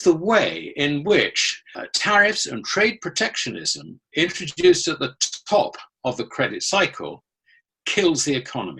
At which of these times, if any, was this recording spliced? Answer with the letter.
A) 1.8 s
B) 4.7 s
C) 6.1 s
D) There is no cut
A